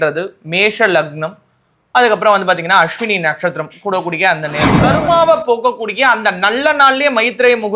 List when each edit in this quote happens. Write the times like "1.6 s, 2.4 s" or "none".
4.8 s